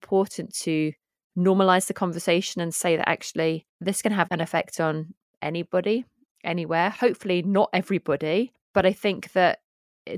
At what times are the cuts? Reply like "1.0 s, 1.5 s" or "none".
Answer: none